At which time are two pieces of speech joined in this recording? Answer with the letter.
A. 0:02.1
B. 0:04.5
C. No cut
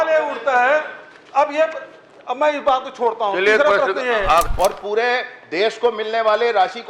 B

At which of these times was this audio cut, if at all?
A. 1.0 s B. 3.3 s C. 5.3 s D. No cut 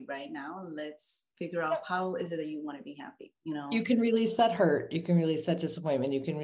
D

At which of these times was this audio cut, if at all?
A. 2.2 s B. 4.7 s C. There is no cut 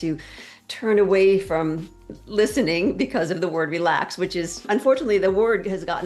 B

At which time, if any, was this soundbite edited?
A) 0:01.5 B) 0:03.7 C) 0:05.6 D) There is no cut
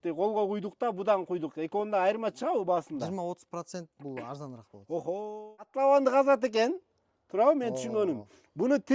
C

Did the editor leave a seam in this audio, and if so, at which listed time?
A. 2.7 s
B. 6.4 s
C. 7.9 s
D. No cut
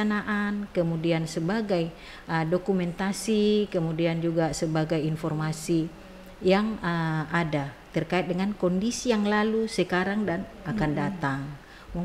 D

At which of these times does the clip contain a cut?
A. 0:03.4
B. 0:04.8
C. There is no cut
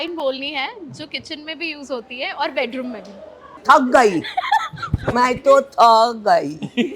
A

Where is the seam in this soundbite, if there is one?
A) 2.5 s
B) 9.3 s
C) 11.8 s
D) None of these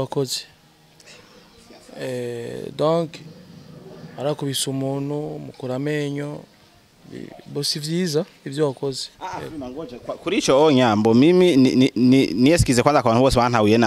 D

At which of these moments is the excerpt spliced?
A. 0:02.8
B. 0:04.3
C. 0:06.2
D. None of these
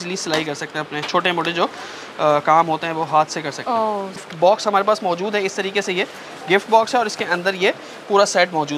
B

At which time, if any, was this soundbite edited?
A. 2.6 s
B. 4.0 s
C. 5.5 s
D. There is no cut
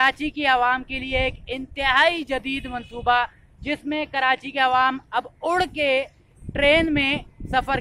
D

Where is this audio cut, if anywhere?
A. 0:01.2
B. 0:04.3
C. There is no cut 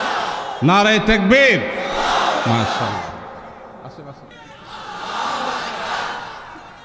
B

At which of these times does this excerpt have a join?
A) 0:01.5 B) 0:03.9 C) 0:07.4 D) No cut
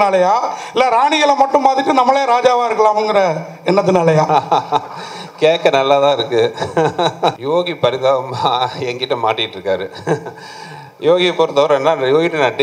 C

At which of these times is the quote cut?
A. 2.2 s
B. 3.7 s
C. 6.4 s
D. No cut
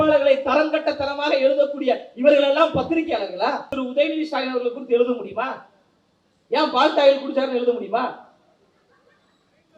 B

